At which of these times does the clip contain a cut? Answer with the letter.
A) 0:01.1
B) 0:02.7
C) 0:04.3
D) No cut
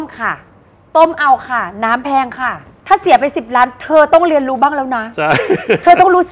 B